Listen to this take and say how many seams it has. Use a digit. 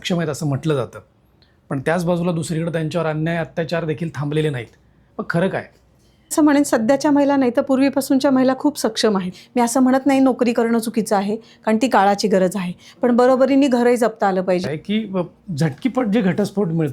3